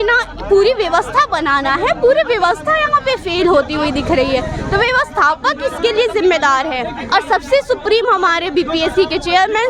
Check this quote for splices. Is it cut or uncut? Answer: uncut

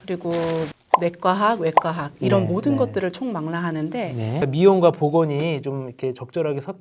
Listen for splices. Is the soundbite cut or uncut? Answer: cut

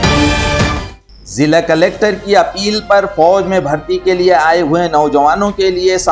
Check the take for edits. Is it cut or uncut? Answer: cut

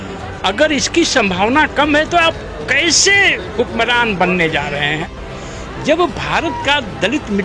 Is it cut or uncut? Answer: cut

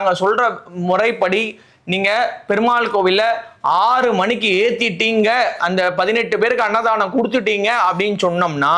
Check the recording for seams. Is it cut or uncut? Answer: uncut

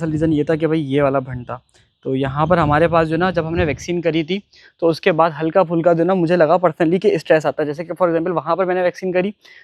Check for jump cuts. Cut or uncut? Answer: uncut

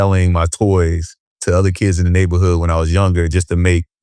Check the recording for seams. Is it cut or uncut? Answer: uncut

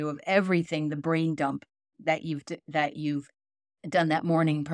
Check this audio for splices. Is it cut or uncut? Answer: uncut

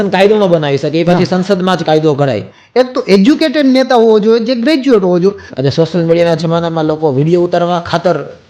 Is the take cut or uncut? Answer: cut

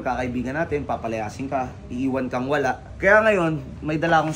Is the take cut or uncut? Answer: cut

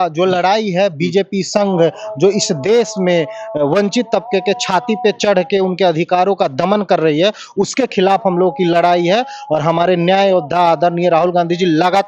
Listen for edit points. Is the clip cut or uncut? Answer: uncut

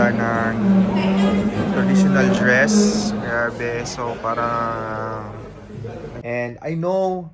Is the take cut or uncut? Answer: cut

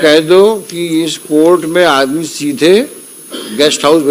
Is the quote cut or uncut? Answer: uncut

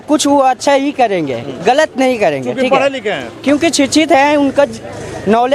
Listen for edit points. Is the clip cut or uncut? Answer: uncut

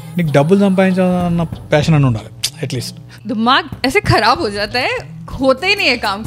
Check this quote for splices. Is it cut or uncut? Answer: cut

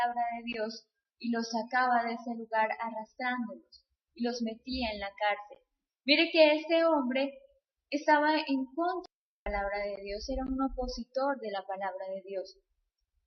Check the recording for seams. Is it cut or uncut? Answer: cut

